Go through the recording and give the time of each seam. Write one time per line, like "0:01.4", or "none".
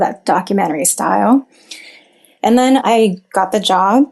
0:02.8